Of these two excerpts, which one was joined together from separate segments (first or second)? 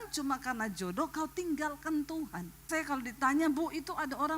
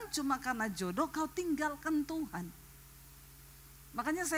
first